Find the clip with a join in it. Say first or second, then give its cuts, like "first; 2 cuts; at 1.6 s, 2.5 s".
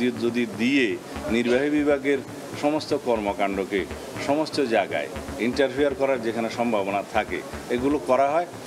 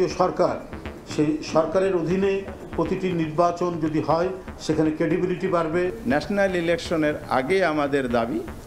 second; 1 cut; at 5.9 s